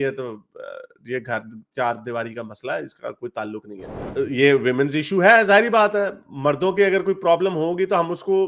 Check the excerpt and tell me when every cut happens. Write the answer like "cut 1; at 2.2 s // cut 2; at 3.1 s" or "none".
cut 1; at 4.1 s